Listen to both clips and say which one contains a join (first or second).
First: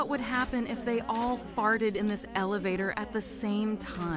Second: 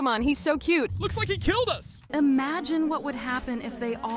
second